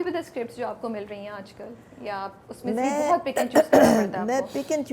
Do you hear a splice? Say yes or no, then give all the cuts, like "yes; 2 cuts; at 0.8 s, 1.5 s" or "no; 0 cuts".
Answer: no; 0 cuts